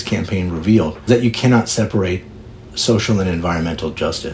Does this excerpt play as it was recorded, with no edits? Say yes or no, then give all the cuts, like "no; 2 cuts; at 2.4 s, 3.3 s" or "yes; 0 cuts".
no; 2 cuts; at 1.1 s, 2.7 s